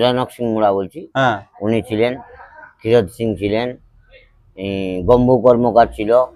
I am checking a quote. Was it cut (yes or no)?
no